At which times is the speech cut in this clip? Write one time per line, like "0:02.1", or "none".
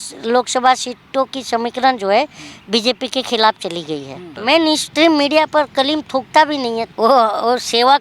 0:04.4
0:06.9